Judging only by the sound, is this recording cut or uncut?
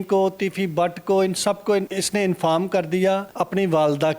cut